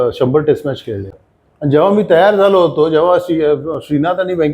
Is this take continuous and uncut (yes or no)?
no